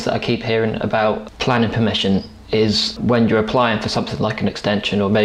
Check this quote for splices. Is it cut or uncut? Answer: cut